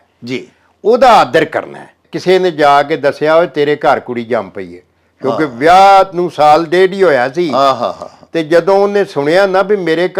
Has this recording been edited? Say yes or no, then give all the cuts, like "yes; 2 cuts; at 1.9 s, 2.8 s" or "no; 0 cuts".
yes; 1 cut; at 2.1 s